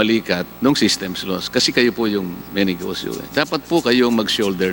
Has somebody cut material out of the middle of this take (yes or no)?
no